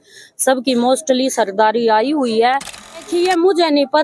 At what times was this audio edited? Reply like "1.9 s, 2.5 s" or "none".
3.0 s